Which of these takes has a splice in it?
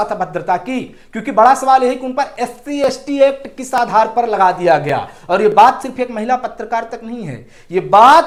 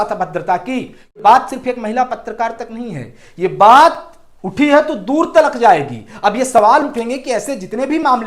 second; 1 cut; at 1.2 s

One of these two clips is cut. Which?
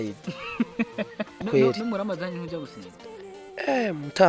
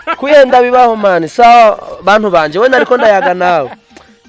first; 1 cut; at 1.4 s

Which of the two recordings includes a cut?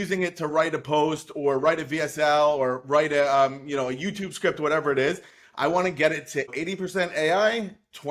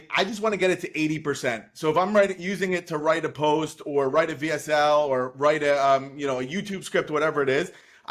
first; 1 cut; at 6.5 s

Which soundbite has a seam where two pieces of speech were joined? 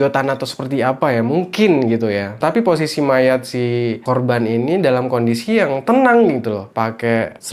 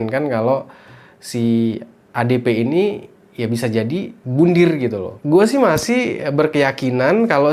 second; 1 cut; at 5.2 s

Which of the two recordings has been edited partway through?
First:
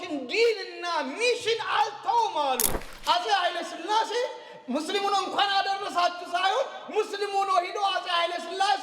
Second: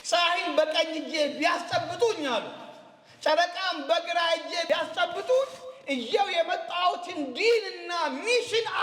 first; 1 cut; at 2.8 s

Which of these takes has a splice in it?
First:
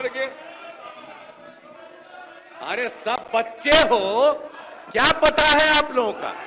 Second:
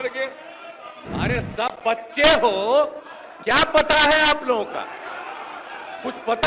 second; 1 cut; at 0.9 s

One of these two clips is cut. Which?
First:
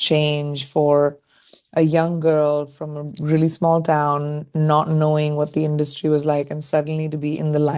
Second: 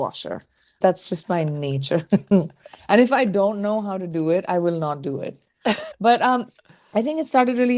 second; 2 cuts; at 0.8 s, 5.9 s

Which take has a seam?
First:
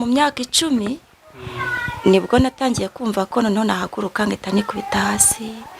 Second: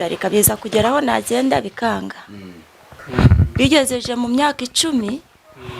second; 1 cut; at 3.0 s

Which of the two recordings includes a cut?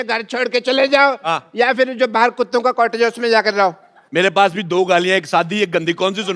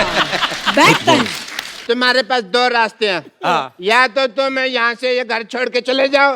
second; 1 cut; at 1.7 s

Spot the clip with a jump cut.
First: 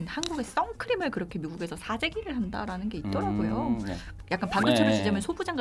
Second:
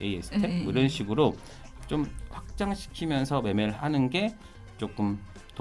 first; 1 cut; at 4.2 s

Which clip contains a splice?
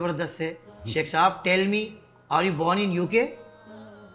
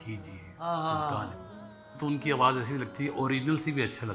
second; 1 cut; at 1.8 s

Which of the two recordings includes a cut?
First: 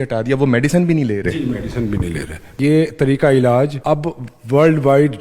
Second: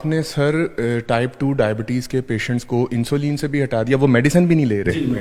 first; 2 cuts; at 2.6 s, 3.8 s

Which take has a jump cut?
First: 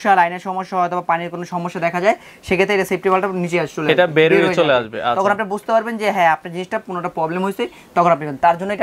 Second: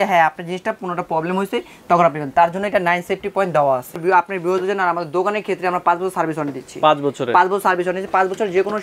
second; 1 cut; at 3.9 s

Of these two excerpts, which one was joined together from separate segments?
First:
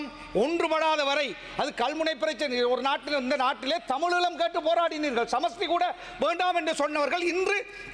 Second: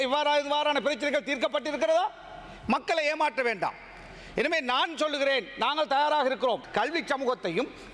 second; 1 cut; at 6.7 s

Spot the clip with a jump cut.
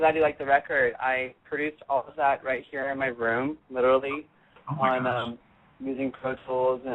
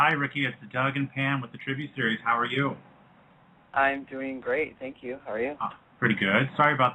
first; 1 cut; at 3.7 s

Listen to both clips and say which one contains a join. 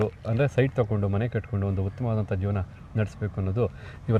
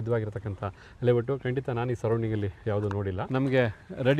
second; 1 cut; at 3.2 s

